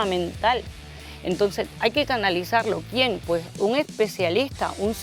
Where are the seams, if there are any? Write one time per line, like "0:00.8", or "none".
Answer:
none